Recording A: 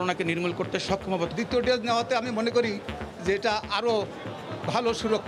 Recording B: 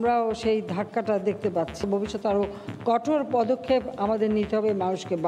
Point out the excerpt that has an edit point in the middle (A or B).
B